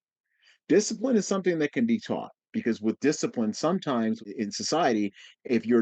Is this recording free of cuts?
no; 2 cuts; at 2.5 s, 4.3 s

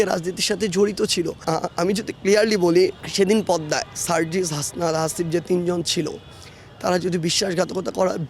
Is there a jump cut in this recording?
yes; 2 cuts; at 1.4 s, 3.0 s

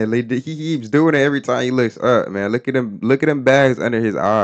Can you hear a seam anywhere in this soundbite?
no; 0 cuts

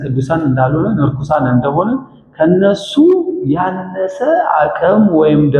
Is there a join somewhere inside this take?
no; 0 cuts

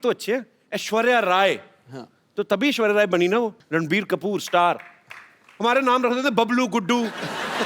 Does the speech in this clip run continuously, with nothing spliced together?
no; 1 cut; at 3.6 s

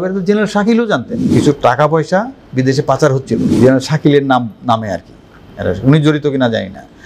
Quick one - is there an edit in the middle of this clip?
yes; 2 cuts; at 1.2 s, 3.5 s

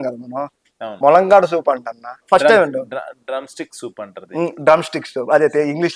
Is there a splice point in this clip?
yes; 1 cut; at 2.2 s

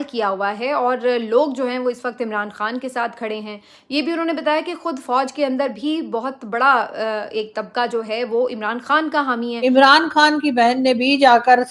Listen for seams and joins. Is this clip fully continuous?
no; 1 cut; at 9.5 s

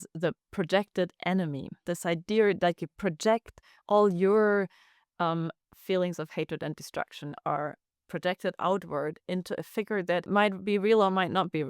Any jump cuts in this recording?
yes; 2 cuts; at 1.7 s, 10.2 s

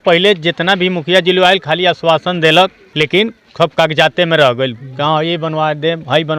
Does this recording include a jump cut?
yes; 1 cut; at 2.8 s

